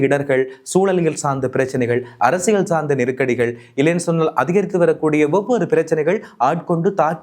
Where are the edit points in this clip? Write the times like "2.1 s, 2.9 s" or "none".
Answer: none

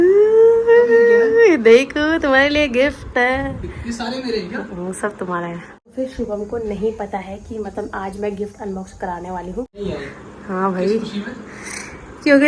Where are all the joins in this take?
5.8 s, 9.8 s

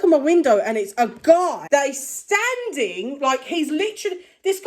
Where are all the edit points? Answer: 1.6 s

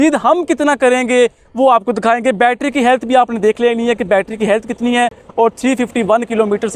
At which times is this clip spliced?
none

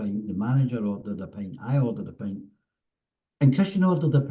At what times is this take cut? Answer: none

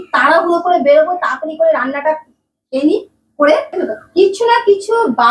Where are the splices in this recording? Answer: 3.7 s

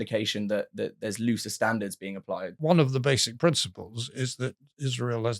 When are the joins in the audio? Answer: 2.6 s

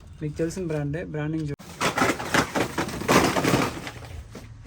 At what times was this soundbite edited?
1.5 s

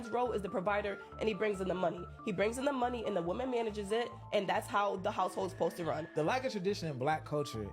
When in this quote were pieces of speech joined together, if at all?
2.7 s, 6.6 s

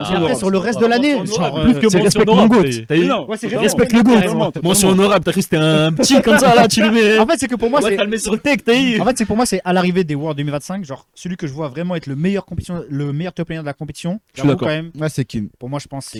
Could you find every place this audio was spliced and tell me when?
none

